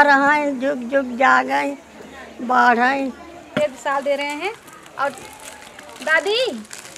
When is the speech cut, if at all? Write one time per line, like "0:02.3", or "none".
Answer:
0:03.5